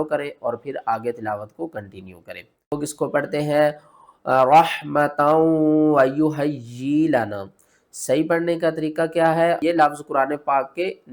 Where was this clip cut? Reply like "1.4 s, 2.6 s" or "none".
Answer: 2.8 s, 9.6 s